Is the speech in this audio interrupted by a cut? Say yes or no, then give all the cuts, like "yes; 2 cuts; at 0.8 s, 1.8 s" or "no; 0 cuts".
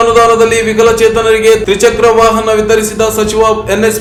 no; 0 cuts